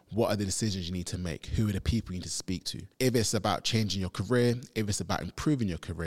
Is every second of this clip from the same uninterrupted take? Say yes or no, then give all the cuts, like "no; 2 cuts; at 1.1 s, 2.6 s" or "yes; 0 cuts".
no; 1 cut; at 2.8 s